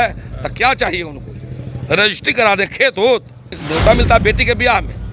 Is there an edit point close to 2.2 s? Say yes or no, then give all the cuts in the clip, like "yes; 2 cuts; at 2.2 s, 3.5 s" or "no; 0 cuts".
no; 1 cut; at 3.6 s